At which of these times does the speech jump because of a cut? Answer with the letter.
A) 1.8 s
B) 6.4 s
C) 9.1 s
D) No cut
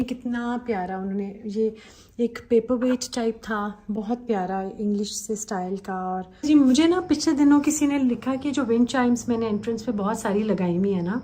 B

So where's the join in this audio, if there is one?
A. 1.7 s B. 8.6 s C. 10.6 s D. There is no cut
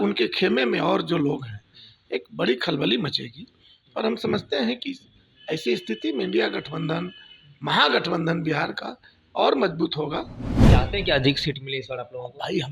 C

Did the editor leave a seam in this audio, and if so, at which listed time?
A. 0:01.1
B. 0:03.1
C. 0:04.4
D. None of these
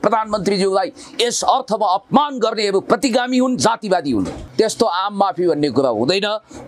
C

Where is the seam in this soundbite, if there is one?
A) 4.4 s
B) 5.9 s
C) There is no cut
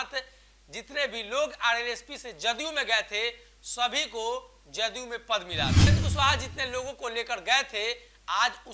B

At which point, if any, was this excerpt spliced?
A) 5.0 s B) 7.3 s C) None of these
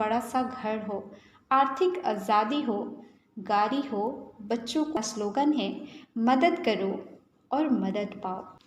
A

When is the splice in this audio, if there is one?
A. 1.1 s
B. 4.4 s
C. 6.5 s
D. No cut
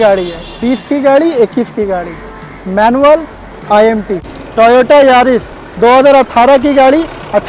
B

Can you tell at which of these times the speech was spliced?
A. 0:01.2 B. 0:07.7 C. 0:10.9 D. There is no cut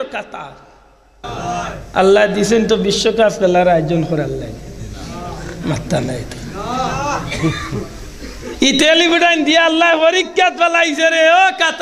A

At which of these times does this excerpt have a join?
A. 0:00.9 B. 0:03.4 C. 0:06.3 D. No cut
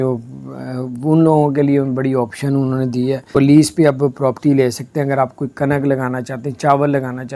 B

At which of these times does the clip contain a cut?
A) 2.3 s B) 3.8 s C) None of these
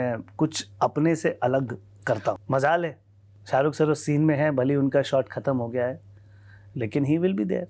A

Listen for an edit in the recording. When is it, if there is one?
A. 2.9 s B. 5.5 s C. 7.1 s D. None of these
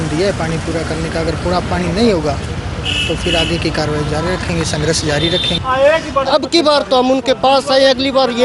B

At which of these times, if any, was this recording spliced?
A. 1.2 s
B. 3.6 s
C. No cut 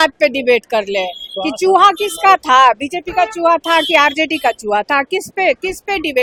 C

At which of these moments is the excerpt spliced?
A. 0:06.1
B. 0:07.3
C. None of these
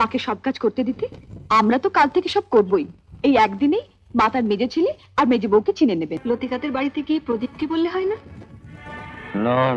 A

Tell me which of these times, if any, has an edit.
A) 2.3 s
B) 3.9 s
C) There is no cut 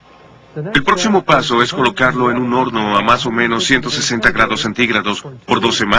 B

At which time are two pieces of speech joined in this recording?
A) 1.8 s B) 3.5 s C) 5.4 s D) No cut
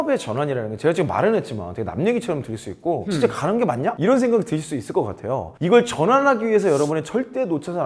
D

